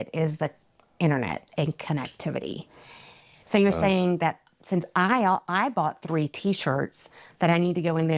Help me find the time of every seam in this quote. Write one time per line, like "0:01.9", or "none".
0:03.3

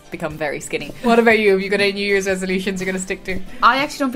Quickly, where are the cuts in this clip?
0:01.0

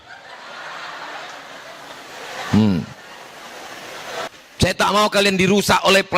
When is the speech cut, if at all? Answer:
0:04.3

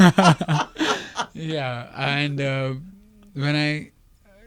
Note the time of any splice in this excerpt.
none

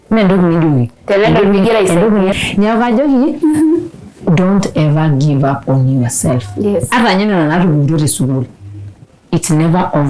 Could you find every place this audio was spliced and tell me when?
0:02.3

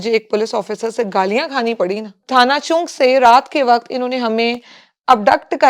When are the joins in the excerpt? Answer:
0:02.2

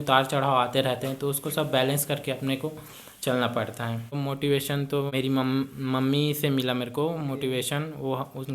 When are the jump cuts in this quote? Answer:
0:04.2
0:05.1

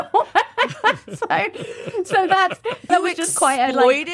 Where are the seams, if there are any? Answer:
0:02.9

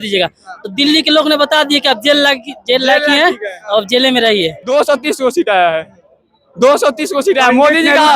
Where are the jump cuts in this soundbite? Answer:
0:04.6

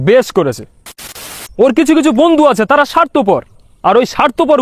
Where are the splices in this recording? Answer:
0:01.0

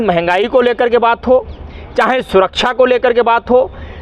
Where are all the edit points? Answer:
none

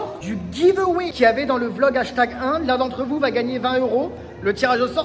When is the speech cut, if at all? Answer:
none

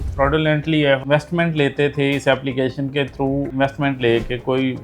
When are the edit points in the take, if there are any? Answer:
0:01.0

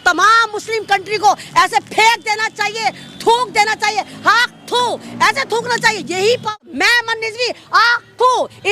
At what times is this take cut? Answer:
0:06.6

